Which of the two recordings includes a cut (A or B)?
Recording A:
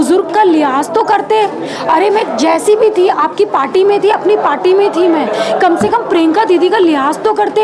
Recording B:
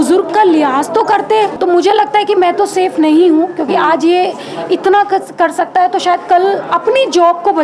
B